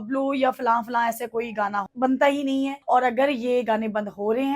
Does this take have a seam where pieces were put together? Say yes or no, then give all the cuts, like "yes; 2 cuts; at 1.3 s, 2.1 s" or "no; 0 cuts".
yes; 2 cuts; at 1.9 s, 2.8 s